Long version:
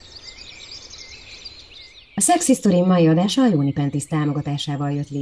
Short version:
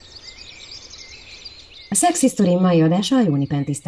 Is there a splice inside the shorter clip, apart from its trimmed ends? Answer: yes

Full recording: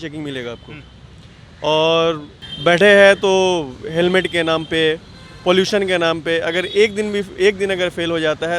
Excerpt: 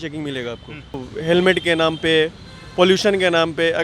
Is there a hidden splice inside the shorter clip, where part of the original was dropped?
yes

